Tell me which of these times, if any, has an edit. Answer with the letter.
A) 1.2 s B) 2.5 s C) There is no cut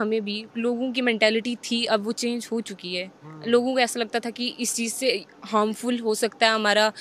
C